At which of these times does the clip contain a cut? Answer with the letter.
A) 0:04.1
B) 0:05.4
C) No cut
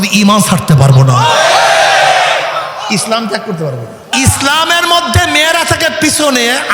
A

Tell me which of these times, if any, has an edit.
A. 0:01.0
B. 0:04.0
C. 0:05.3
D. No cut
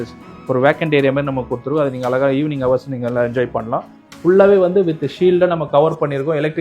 B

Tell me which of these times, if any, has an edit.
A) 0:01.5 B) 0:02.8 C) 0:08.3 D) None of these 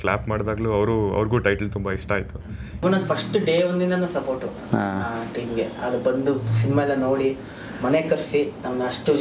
B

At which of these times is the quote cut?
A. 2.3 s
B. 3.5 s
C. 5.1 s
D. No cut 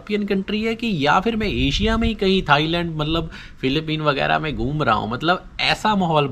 D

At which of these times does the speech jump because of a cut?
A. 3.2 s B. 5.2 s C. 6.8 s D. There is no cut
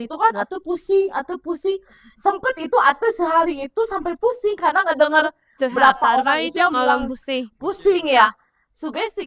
D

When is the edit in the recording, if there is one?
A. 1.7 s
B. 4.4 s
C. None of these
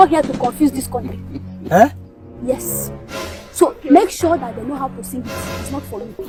C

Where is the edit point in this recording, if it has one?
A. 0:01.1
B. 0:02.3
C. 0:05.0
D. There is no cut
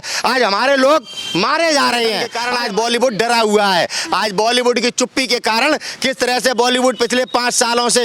B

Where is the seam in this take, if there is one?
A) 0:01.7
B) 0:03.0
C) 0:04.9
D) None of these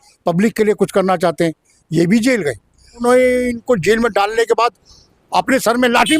B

